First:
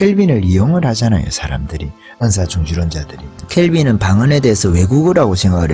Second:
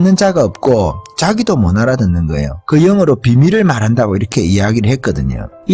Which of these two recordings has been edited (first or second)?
second